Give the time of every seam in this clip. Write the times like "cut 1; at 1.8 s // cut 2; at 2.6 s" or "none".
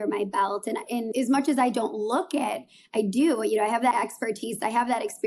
cut 1; at 1.1 s // cut 2; at 3.9 s